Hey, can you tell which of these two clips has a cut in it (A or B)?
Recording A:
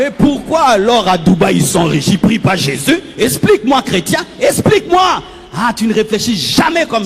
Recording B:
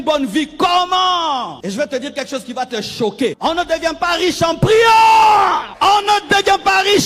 B